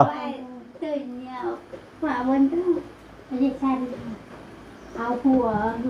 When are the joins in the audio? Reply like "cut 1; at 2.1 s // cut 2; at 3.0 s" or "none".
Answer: none